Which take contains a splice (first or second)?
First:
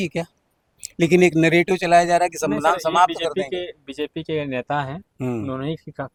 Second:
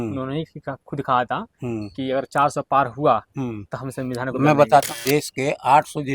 second